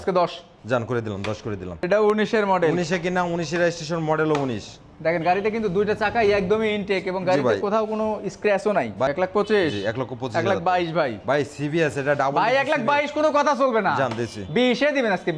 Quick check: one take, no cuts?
no; 2 cuts; at 1.9 s, 9.1 s

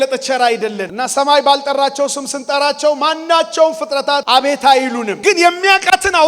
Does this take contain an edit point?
yes; 3 cuts; at 0.9 s, 4.2 s, 5.1 s

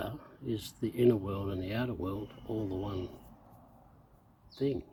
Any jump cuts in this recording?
no; 0 cuts

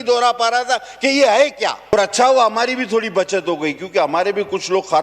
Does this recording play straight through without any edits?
no; 1 cut; at 1.9 s

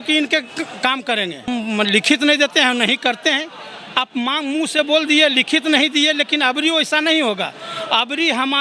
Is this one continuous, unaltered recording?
no; 1 cut; at 1.5 s

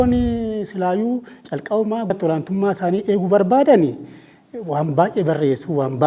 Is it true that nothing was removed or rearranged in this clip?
no; 1 cut; at 2.1 s

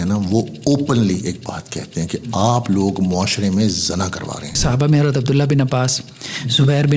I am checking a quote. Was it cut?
yes; 1 cut; at 4.6 s

